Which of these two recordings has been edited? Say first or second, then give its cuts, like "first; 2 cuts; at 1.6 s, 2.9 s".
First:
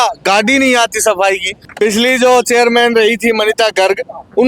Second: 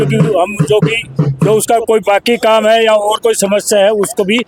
first; 1 cut; at 1.5 s